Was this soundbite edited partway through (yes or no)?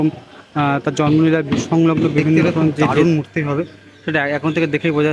yes